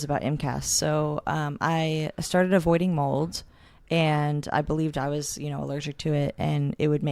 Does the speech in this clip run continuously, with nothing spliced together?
yes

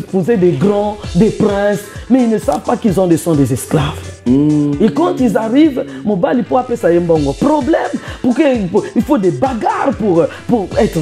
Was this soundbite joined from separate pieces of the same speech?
no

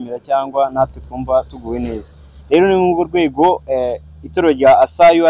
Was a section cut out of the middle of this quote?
no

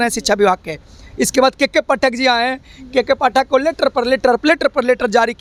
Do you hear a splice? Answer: no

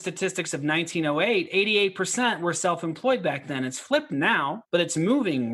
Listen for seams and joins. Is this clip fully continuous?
no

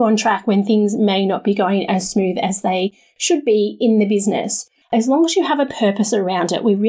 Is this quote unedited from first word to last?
no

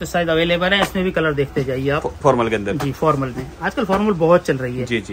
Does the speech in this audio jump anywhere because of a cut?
no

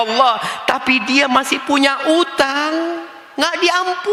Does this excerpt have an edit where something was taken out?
no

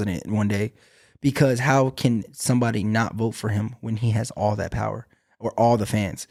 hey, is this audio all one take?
yes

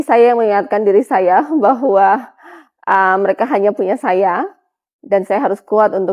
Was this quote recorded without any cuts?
yes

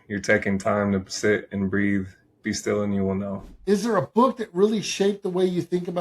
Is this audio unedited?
no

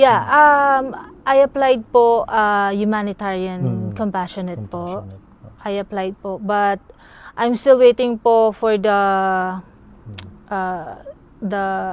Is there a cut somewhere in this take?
no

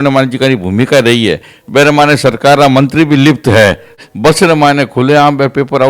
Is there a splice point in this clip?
yes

